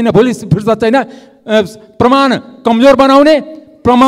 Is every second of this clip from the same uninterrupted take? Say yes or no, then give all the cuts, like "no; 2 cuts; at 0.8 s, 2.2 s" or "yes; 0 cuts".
yes; 0 cuts